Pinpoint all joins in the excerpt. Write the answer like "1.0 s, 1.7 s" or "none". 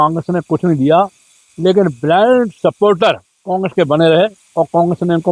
3.3 s, 4.4 s